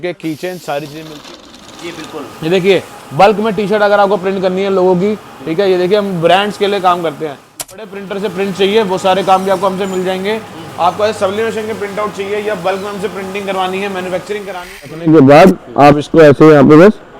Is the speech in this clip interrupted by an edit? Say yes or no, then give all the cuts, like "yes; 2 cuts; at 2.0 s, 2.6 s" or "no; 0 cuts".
yes; 3 cuts; at 1.5 s, 7.9 s, 14.9 s